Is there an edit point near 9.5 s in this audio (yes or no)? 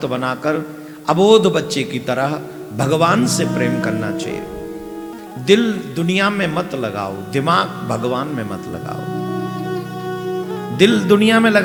no